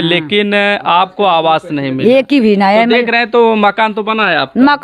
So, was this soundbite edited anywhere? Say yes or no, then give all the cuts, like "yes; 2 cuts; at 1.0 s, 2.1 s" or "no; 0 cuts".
no; 0 cuts